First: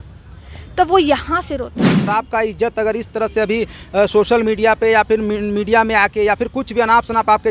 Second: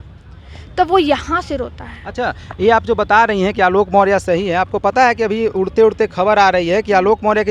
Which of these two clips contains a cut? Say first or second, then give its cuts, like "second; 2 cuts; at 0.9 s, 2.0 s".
first; 1 cut; at 2.1 s